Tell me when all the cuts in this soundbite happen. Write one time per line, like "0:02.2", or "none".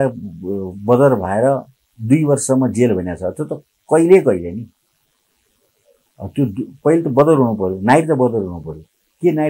none